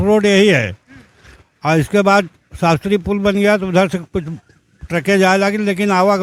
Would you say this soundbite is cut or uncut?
uncut